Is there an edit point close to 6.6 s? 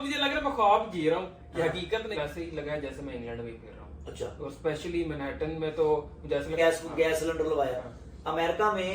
yes; 2 cuts; at 2.1 s, 6.6 s

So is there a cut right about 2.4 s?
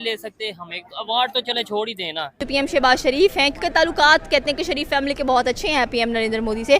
yes; 1 cut; at 2.4 s

